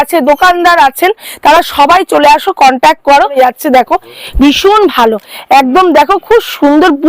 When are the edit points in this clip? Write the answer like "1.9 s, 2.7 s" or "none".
3.4 s